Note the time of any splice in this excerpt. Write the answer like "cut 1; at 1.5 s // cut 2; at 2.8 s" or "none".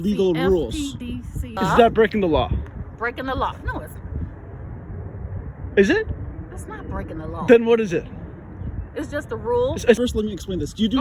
cut 1; at 1.5 s // cut 2; at 10.0 s